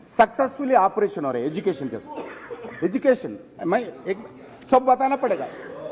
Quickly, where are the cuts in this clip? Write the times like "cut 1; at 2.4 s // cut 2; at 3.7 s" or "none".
none